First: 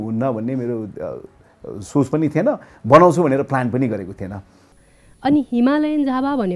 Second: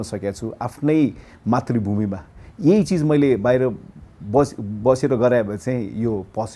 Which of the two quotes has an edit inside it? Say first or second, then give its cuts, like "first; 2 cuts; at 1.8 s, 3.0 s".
first; 1 cut; at 4.8 s